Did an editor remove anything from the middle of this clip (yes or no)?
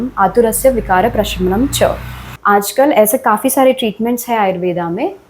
yes